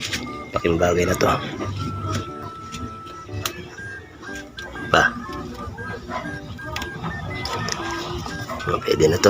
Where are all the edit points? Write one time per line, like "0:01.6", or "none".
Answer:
0:08.4